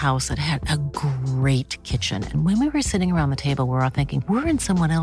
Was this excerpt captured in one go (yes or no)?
yes